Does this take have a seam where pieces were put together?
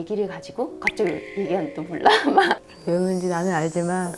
yes; 1 cut; at 2.5 s

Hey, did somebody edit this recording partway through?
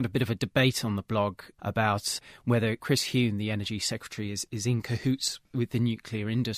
yes; 2 cuts; at 2.8 s, 5.4 s

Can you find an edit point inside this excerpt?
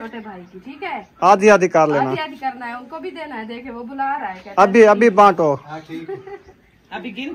no; 0 cuts

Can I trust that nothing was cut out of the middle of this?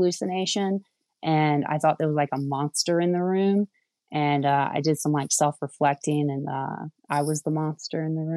yes; 0 cuts

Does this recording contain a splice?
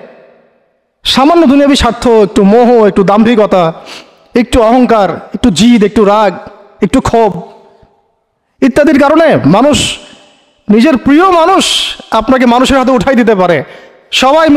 no; 0 cuts

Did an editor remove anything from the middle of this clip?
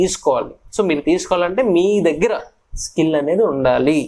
no; 0 cuts

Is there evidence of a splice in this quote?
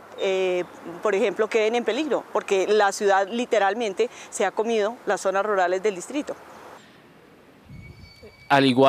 no; 0 cuts

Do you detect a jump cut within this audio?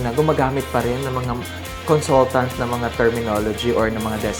no; 0 cuts

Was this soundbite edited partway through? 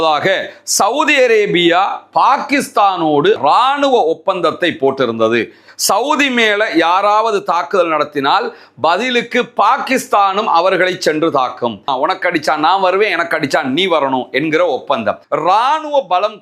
yes; 4 cuts; at 3.4 s, 5.7 s, 11.9 s, 15.2 s

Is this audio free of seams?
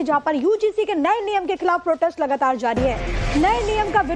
no; 1 cut; at 2.8 s

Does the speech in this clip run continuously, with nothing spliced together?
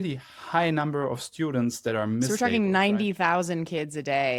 yes; 0 cuts

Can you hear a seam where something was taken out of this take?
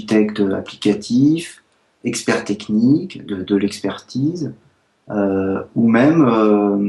no; 0 cuts

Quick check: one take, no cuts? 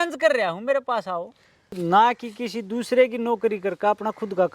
no; 1 cut; at 1.7 s

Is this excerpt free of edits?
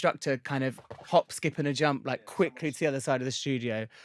yes; 0 cuts

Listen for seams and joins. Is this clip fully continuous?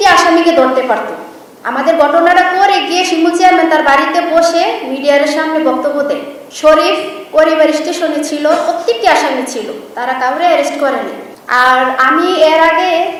yes; 0 cuts

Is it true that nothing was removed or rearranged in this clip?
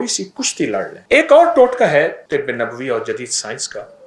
no; 2 cuts; at 1.0 s, 2.2 s

